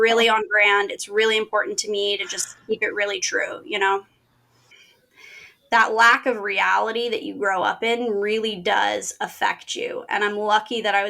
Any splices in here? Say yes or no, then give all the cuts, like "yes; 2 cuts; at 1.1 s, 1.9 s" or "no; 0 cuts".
yes; 1 cut; at 4.7 s